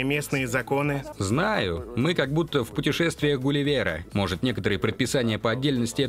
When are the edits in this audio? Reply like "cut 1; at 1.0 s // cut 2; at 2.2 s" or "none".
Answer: cut 1; at 1.1 s // cut 2; at 4.0 s